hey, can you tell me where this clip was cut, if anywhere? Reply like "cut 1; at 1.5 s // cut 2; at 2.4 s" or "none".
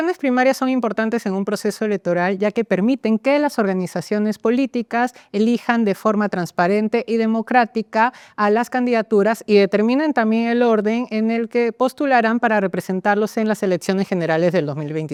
none